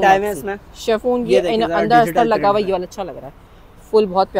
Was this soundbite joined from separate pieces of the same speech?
no; 0 cuts

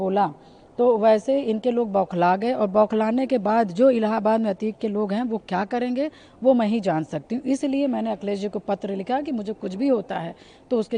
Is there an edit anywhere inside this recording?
no; 0 cuts

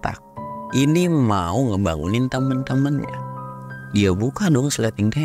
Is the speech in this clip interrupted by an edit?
no; 0 cuts

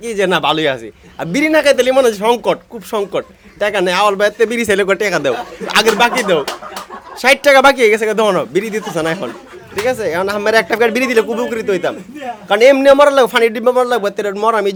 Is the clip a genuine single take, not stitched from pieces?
yes; 0 cuts

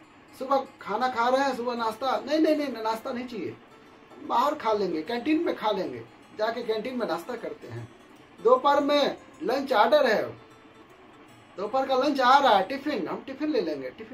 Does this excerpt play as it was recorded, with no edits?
yes; 0 cuts

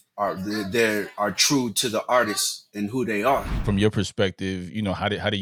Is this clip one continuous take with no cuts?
no; 1 cut; at 3.5 s

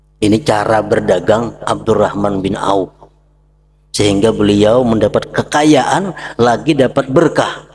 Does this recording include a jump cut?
no; 0 cuts

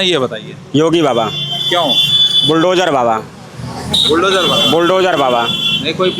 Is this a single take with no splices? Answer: yes; 0 cuts

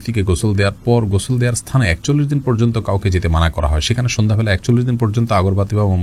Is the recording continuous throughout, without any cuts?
yes; 0 cuts

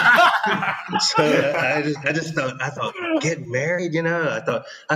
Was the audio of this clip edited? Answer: no; 0 cuts

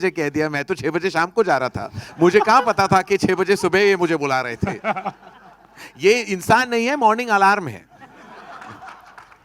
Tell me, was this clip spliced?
no; 0 cuts

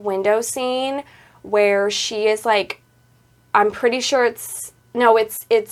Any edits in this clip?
no; 0 cuts

